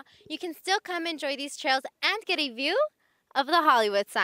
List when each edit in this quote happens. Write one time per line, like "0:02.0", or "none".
none